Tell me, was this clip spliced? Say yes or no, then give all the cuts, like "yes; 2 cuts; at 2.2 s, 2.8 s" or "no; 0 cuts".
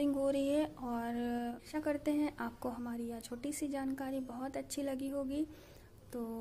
yes; 1 cut; at 1.6 s